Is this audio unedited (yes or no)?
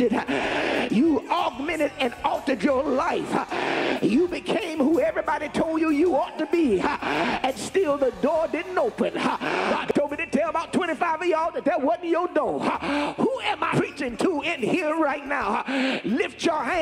no